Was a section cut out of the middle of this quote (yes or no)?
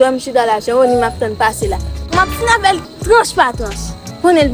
no